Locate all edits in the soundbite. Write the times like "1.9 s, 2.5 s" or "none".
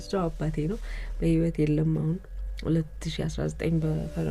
none